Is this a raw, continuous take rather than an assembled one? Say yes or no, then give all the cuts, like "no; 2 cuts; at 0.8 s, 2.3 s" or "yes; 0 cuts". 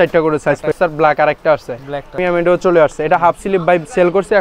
no; 2 cuts; at 0.7 s, 2.2 s